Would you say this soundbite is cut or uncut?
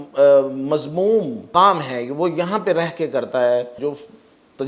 cut